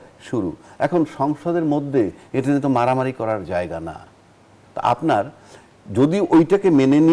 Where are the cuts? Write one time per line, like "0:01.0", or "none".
none